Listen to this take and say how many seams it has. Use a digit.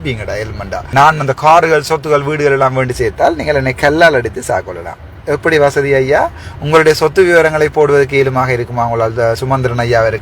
1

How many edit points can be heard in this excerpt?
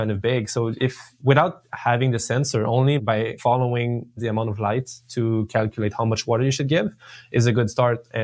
1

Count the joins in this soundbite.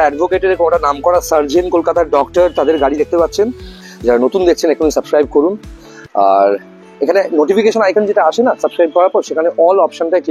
1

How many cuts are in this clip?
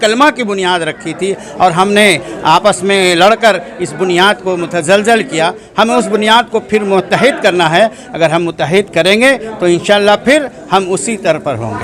0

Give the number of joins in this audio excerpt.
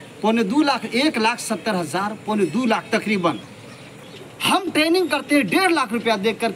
1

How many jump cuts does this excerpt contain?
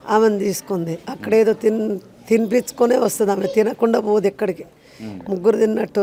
0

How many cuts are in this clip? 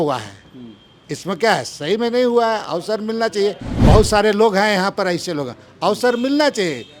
1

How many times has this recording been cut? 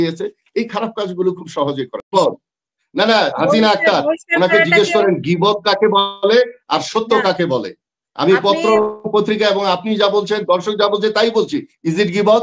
1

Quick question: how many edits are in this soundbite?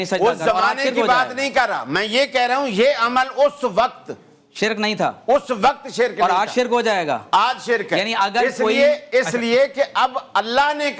0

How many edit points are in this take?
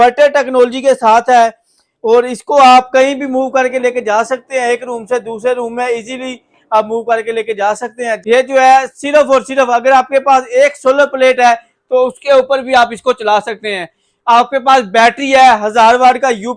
1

